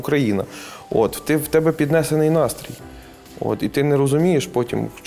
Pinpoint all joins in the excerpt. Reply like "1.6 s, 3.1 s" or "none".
none